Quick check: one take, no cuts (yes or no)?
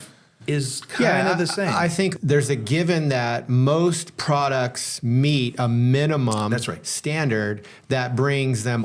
no